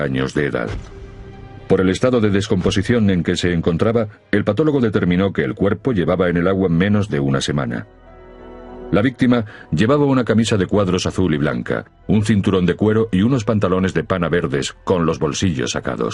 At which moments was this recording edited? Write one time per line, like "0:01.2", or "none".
0:06.9